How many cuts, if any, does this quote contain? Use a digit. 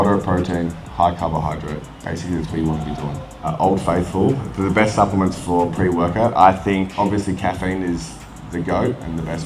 3